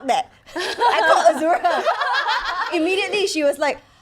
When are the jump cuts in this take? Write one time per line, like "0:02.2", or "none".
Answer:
0:02.7